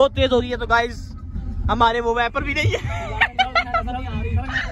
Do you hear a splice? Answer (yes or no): no